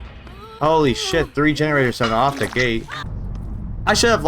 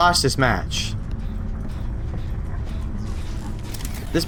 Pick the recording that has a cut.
first; 1 cut; at 3.0 s

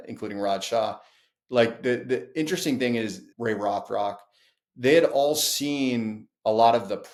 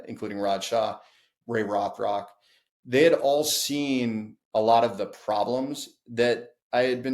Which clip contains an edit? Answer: second; 1 cut; at 1.3 s

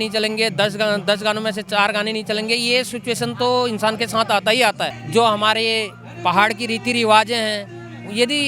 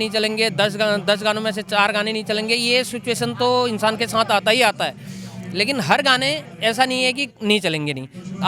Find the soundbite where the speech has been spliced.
first; 1 cut; at 5.0 s

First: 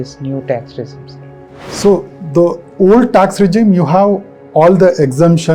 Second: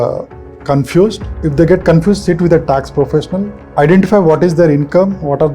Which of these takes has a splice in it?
second; 2 cuts; at 1.3 s, 3.6 s

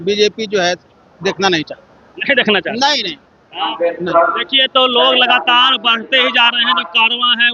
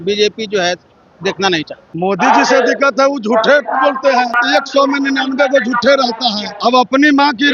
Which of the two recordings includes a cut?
second; 3 cuts; at 1.8 s, 4.4 s, 6.5 s

